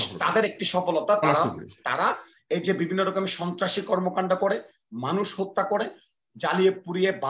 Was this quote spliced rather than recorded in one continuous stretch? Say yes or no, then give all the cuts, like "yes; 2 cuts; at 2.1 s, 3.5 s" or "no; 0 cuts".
no; 0 cuts